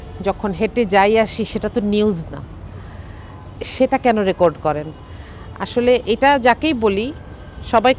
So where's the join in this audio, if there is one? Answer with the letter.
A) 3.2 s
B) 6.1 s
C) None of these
C